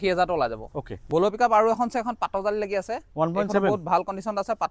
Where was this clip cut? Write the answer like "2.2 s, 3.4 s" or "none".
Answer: 1.0 s